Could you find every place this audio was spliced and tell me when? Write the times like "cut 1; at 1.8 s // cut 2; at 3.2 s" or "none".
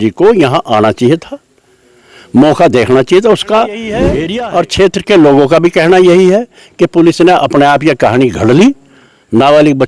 cut 1; at 4.1 s